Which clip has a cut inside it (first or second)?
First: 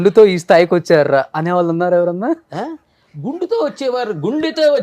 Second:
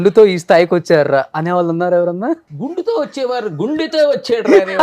second